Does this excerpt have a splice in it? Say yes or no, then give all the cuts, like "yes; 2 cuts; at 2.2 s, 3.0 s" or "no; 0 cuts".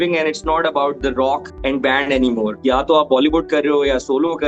yes; 2 cuts; at 1.5 s, 2.6 s